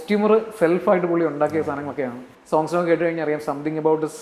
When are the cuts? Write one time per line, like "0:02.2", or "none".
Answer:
0:02.3